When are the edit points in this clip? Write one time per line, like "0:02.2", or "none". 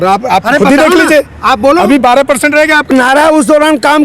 0:02.9

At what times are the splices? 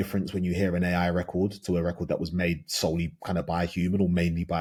none

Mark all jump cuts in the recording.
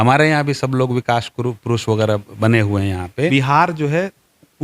0:03.3

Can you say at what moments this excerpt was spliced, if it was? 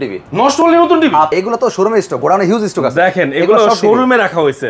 0:01.3

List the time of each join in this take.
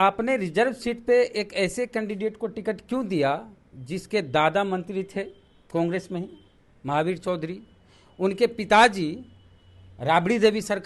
none

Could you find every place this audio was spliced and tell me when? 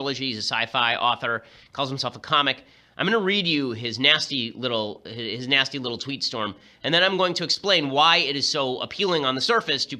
0:05.4

